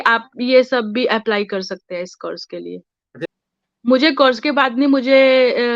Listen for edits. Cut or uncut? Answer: cut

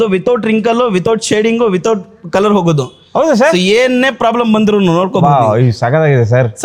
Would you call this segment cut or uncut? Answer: uncut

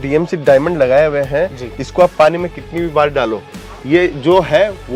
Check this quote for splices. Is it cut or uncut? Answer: uncut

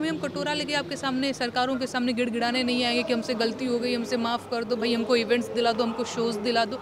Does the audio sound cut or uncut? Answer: uncut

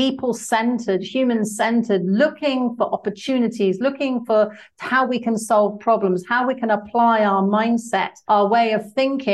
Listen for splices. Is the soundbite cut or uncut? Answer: cut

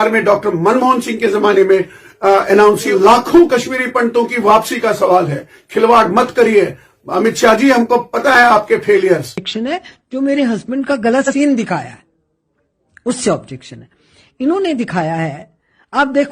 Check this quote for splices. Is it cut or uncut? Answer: cut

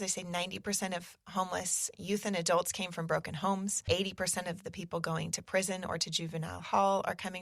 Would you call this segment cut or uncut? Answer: cut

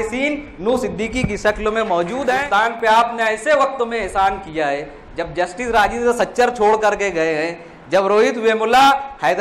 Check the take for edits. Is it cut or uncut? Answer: cut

